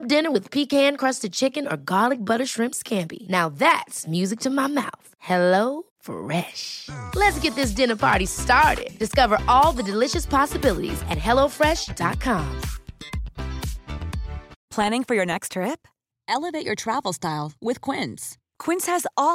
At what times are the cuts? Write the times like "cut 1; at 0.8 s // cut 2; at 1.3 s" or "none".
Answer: cut 1; at 14.6 s